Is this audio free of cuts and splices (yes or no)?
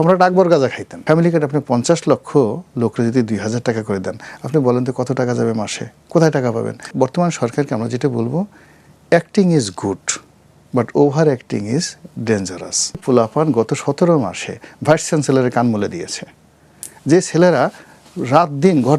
no